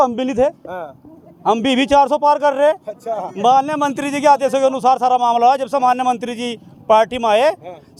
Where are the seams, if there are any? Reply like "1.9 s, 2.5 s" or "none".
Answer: none